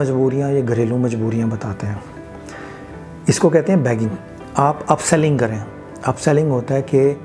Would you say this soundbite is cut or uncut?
uncut